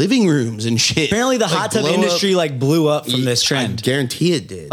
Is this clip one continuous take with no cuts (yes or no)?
no